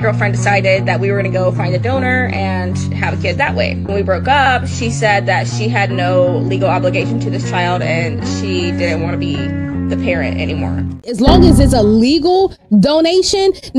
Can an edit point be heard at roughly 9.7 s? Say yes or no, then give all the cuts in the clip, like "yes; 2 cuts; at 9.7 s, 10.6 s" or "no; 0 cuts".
no; 1 cut; at 11.1 s